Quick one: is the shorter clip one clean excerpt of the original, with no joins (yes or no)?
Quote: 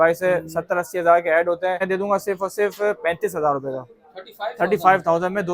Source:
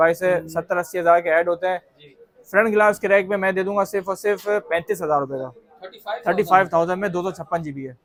no